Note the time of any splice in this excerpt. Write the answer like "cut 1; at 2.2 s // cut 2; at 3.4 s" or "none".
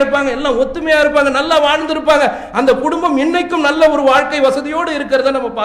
none